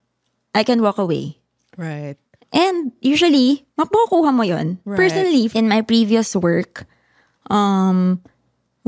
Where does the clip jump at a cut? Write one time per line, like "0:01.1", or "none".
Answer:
0:05.5